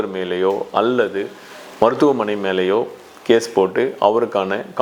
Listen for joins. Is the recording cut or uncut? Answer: uncut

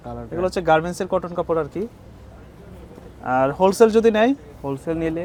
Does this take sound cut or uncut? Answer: uncut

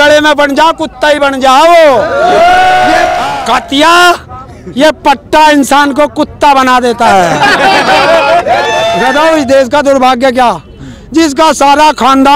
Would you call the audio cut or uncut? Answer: cut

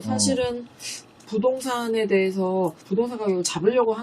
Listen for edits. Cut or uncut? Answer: cut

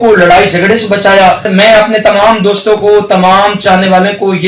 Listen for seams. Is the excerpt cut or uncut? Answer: cut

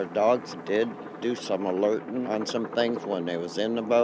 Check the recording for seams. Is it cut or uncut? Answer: cut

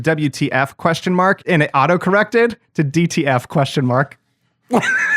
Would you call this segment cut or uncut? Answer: cut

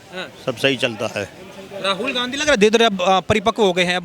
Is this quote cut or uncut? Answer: uncut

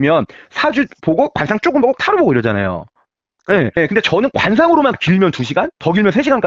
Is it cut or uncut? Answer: uncut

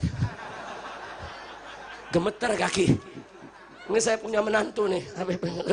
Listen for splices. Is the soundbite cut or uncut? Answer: uncut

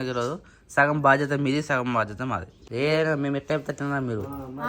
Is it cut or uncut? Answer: cut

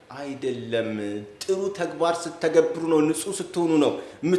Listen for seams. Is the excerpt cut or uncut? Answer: uncut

